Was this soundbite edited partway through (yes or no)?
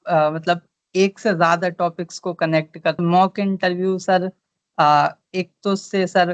yes